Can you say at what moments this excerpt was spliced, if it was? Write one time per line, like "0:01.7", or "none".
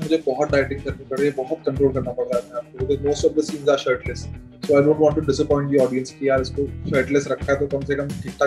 none